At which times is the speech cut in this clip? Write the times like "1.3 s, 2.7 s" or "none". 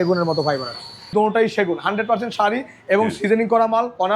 1.1 s